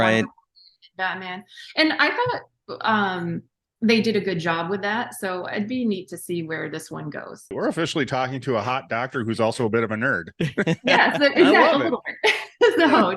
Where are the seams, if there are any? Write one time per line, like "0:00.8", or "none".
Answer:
0:07.5